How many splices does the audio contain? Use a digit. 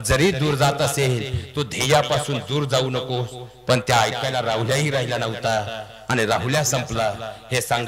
0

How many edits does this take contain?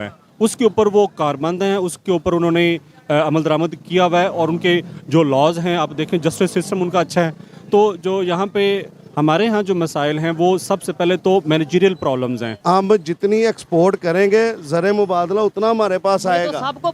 1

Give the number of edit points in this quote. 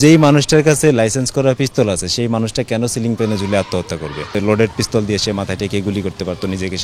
1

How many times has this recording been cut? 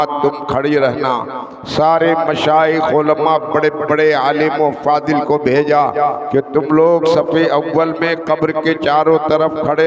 0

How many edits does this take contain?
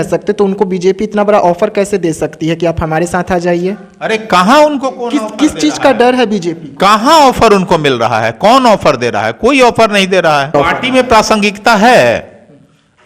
1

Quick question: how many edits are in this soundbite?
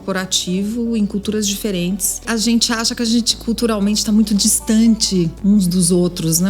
1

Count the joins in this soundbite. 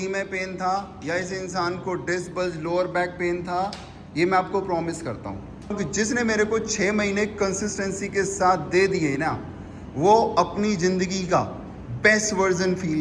1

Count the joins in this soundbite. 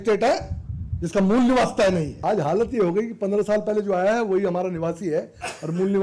1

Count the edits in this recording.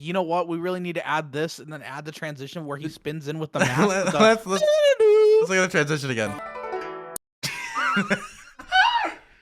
0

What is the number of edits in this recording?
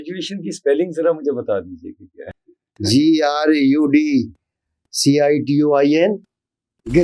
1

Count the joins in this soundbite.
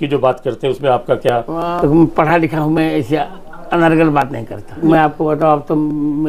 2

